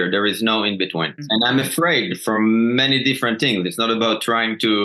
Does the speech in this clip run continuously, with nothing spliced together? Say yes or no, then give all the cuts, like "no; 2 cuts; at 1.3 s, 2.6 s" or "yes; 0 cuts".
no; 1 cut; at 1.2 s